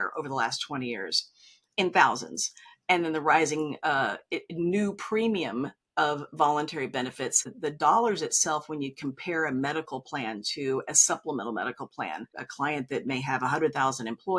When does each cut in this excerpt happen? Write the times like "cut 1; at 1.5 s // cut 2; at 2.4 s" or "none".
cut 1; at 7.5 s // cut 2; at 12.4 s